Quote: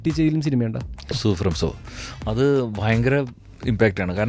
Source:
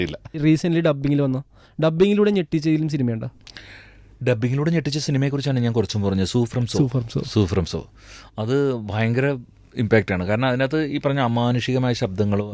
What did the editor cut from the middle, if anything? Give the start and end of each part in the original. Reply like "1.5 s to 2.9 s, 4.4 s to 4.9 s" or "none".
3.6 s to 7.3 s